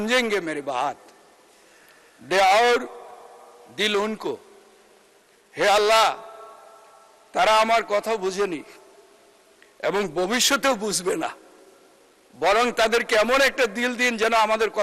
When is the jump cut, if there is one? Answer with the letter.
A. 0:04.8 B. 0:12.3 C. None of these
C